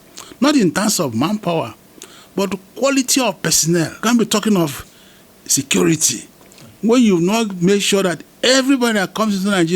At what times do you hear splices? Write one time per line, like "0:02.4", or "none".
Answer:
0:04.0